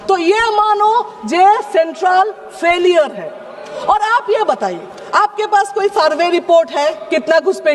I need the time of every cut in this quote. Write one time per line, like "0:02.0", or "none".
none